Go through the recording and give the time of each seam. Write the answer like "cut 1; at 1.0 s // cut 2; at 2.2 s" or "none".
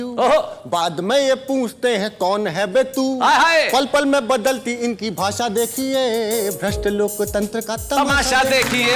none